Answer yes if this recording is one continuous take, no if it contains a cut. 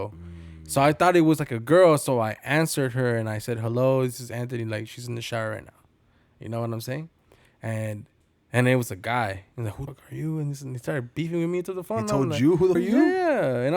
no